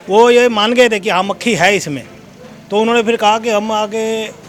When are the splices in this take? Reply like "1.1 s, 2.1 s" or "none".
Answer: none